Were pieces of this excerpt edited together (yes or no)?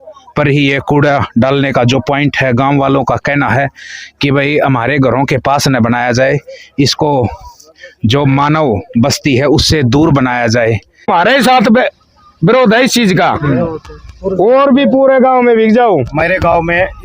yes